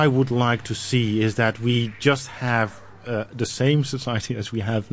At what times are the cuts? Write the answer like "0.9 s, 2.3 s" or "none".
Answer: none